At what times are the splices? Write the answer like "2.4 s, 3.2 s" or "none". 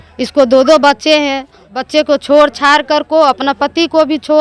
1.8 s